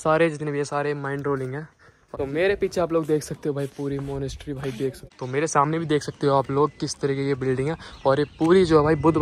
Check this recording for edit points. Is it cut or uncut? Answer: cut